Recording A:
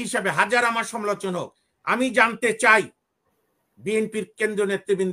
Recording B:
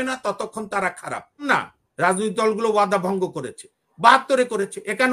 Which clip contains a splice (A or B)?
B